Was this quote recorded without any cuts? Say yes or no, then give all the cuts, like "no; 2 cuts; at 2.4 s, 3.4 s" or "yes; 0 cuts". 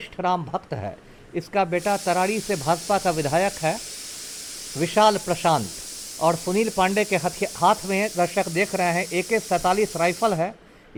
yes; 0 cuts